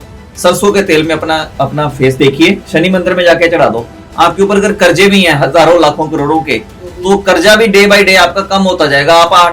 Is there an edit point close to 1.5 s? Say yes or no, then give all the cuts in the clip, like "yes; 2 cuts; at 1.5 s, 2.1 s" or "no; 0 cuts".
yes; 2 cuts; at 1.5 s, 2.6 s